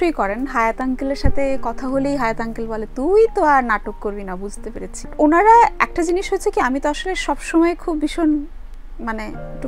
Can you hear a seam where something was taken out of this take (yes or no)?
yes